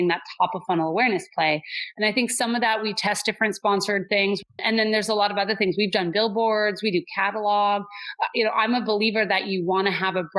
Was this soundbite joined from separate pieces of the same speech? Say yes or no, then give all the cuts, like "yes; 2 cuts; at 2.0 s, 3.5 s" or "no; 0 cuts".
yes; 1 cut; at 4.4 s